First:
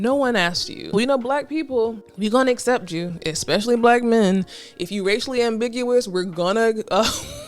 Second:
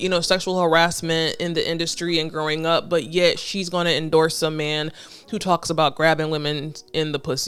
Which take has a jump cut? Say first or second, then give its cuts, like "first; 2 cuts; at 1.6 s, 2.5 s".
first; 2 cuts; at 0.9 s, 2.0 s